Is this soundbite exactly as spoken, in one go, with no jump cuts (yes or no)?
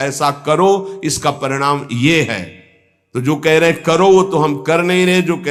yes